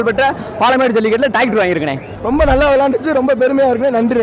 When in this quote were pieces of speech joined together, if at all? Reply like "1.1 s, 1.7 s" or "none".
2.1 s

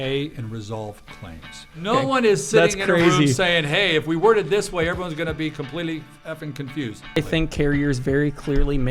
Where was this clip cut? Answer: 1.9 s, 7.2 s

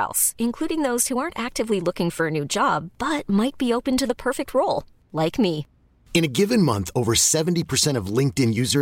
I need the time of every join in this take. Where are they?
none

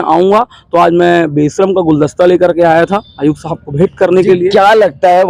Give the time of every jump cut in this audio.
none

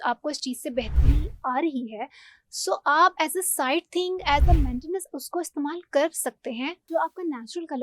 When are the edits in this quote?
6.9 s

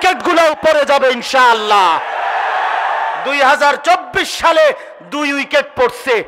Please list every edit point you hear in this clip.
none

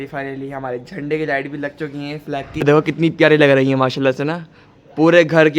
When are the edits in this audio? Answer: 2.6 s

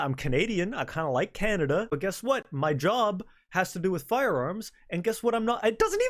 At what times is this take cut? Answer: 1.9 s

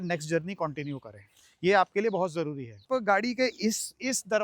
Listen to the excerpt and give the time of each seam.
2.9 s

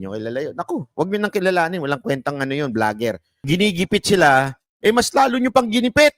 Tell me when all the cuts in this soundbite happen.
3.4 s

